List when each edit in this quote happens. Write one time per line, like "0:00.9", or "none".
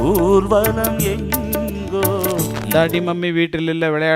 0:02.6